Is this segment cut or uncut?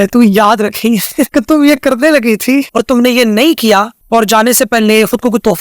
cut